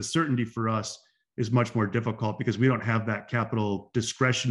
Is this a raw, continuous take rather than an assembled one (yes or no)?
yes